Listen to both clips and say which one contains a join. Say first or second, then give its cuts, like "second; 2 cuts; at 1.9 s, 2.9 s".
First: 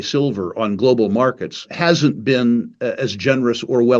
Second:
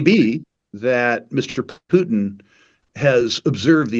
first; 1 cut; at 1.7 s